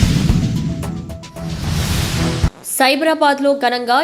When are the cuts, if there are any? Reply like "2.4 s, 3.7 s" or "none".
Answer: 2.5 s